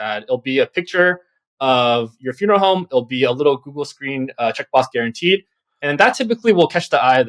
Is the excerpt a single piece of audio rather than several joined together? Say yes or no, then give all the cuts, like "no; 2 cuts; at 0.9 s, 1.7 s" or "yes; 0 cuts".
yes; 0 cuts